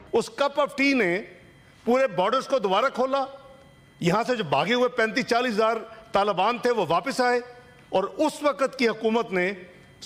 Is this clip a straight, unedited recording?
yes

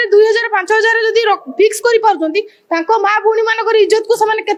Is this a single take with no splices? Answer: yes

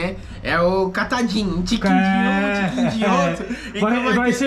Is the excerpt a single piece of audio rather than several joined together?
yes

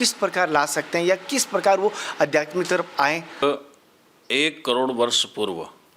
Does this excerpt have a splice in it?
yes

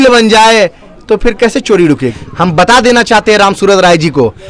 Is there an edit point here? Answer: yes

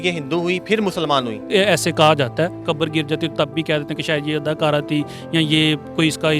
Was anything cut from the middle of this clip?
yes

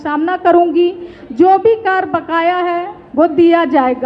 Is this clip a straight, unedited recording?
yes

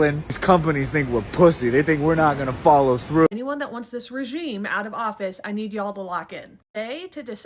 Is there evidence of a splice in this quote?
yes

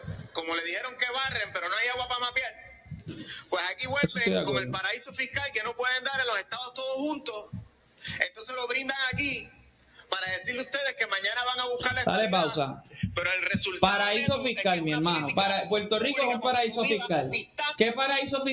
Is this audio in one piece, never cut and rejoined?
yes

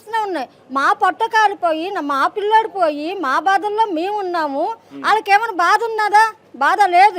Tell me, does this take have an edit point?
no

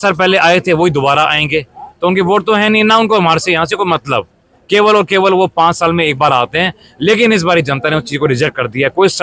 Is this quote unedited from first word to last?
yes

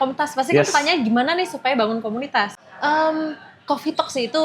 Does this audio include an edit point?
yes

